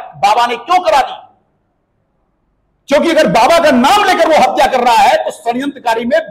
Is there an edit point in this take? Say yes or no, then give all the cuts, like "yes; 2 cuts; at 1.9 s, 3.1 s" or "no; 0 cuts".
no; 0 cuts